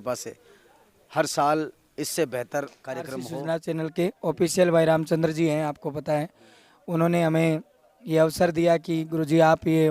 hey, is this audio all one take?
no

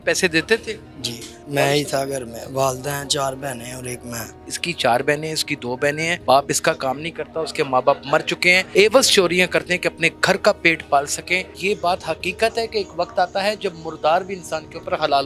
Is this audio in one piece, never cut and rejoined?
no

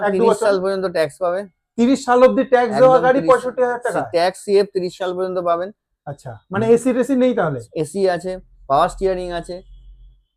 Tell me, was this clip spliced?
no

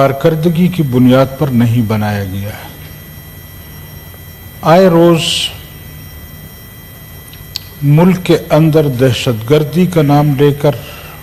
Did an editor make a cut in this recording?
no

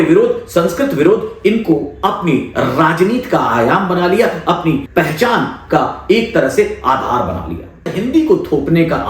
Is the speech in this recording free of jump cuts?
no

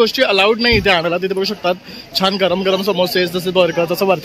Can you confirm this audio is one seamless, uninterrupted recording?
yes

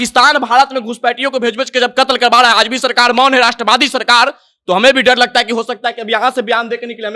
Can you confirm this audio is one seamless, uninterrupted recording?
yes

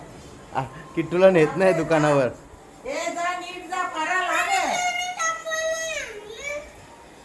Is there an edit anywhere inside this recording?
no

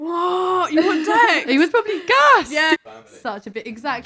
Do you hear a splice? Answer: yes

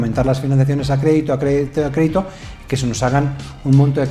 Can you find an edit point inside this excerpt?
no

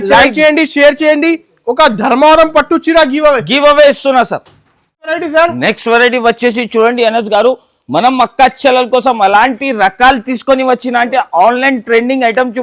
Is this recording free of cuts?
yes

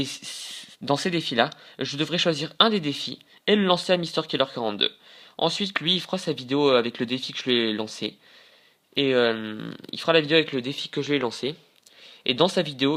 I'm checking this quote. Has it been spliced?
no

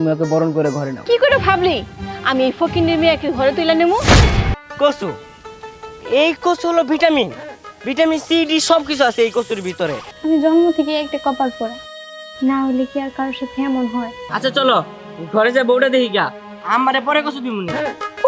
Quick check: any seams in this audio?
yes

